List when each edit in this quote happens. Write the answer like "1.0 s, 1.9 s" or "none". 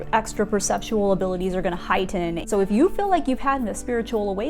2.4 s